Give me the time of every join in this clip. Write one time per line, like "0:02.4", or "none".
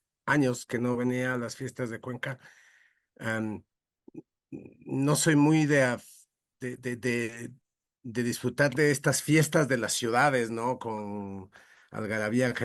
none